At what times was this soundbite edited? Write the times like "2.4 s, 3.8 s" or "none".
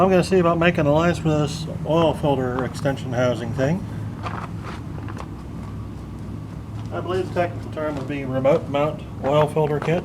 5.3 s